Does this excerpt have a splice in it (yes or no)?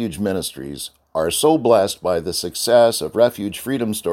no